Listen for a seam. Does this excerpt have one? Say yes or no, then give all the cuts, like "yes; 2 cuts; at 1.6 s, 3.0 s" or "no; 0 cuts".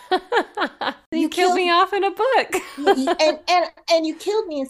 yes; 1 cut; at 1.0 s